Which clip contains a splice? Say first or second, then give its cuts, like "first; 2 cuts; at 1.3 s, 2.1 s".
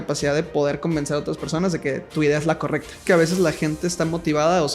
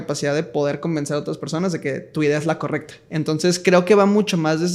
first; 1 cut; at 3.0 s